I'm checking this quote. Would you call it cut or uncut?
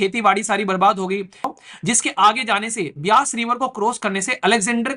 cut